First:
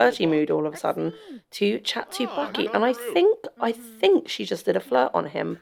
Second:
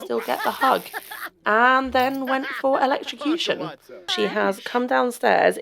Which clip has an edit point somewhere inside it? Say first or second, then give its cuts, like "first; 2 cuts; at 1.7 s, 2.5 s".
second; 1 cut; at 4.1 s